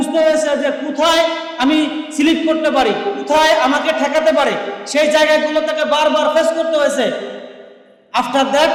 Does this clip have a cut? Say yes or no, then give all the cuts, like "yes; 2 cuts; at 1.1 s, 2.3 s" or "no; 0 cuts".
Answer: no; 0 cuts